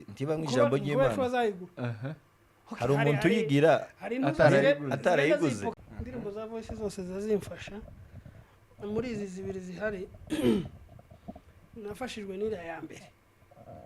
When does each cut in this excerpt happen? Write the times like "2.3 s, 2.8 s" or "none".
5.8 s